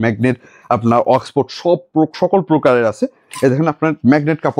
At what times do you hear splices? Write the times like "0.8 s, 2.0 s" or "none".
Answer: none